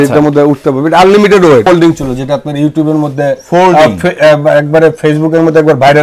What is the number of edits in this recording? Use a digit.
1